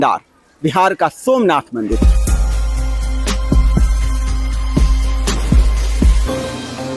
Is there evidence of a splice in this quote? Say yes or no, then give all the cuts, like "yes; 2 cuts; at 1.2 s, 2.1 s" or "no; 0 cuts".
no; 0 cuts